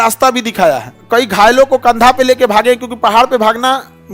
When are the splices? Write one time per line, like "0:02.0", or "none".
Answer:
0:00.9

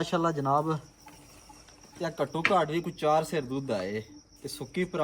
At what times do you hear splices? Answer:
none

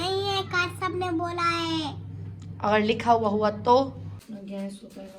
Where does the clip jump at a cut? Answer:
0:04.1

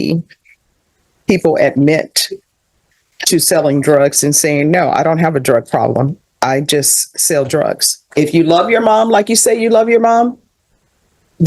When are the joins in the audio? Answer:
0:08.0

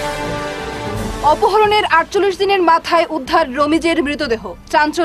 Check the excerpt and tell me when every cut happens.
0:00.9

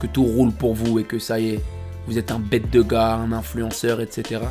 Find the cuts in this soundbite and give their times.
none

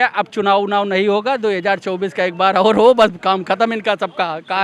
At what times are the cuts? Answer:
none

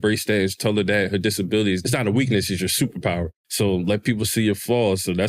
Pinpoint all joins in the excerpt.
0:01.8
0:03.4

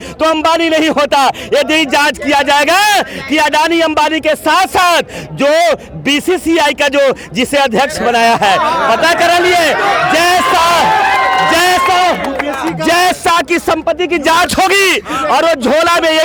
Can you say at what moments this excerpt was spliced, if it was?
none

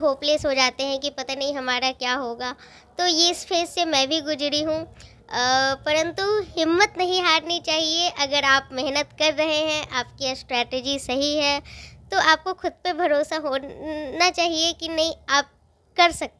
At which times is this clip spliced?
none

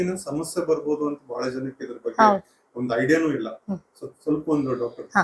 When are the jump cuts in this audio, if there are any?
none

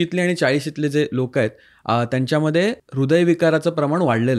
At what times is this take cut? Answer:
0:02.8

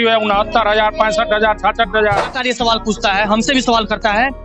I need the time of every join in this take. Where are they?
0:02.4

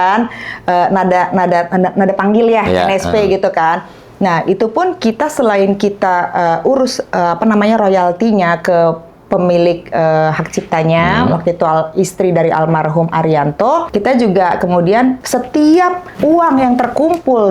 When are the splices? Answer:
0:13.9
0:15.2
0:16.1

